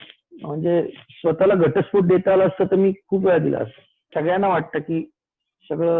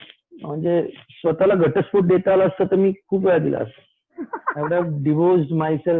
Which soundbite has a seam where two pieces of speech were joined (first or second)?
first